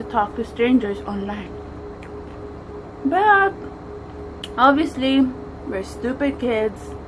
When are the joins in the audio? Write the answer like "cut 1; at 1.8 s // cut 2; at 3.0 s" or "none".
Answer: none